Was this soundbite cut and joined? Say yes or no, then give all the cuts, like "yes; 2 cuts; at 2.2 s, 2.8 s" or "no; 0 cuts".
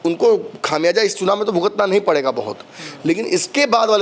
no; 0 cuts